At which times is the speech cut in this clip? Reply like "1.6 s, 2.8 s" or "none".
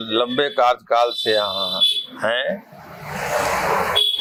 none